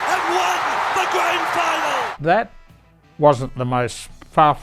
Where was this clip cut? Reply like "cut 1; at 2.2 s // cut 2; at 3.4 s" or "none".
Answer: cut 1; at 2.1 s